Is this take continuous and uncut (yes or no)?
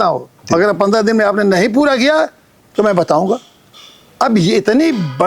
yes